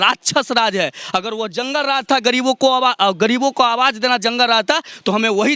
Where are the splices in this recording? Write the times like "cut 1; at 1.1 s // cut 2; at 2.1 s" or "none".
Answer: none